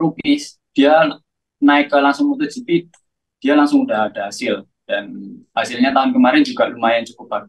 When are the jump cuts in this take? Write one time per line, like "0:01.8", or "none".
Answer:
none

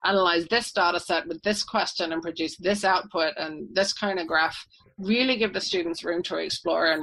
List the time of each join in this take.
none

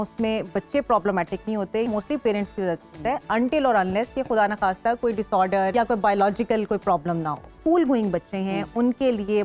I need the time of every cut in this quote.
0:01.8
0:05.7
0:07.6

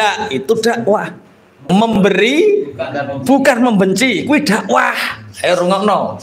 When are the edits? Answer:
0:01.6

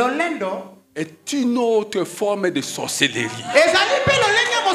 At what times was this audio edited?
none

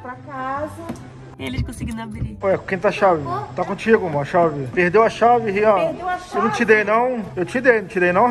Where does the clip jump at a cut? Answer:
0:04.6
0:07.3

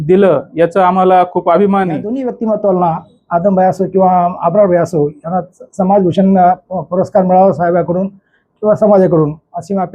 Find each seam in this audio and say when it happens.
0:02.2

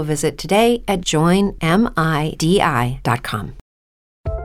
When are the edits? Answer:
0:03.6

